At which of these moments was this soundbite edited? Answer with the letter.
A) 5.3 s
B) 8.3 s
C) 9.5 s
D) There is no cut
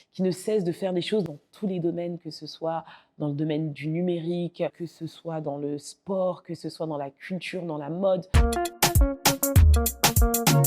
B